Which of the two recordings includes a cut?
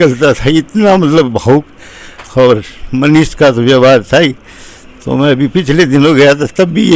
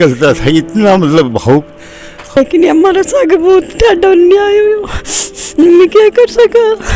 second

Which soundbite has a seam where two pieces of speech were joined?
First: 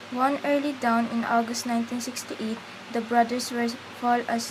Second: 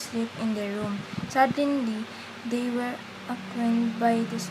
second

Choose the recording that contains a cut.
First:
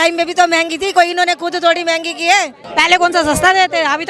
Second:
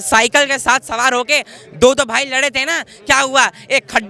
first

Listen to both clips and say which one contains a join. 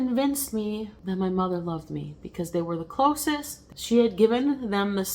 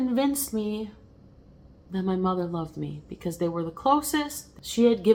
first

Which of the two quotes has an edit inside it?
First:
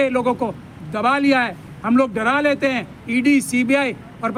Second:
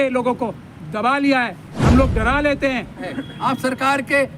second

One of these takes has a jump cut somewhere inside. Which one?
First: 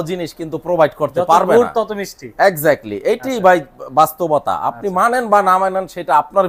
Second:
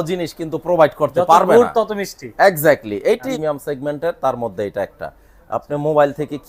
second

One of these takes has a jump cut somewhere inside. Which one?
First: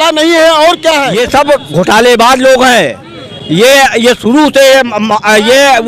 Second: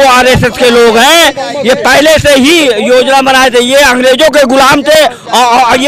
first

